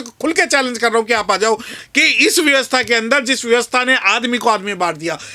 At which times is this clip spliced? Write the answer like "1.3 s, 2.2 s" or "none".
1.8 s